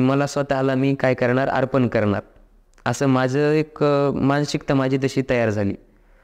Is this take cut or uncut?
uncut